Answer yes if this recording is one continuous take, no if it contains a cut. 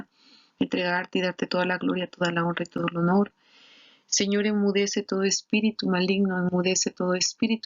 no